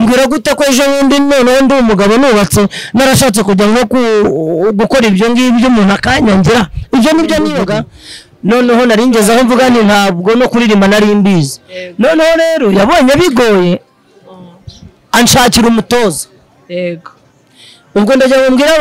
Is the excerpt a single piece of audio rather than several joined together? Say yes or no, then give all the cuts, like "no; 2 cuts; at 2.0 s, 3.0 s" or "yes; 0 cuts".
no; 1 cut; at 7.6 s